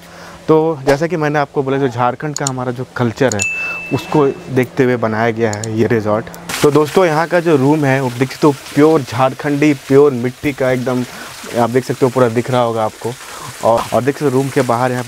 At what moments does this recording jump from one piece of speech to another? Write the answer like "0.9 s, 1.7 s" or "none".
6.5 s, 13.8 s